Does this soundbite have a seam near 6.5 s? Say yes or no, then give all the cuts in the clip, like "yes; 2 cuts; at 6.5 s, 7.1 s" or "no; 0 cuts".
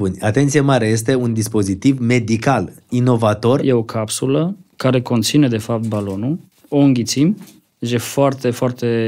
yes; 2 cuts; at 3.6 s, 6.5 s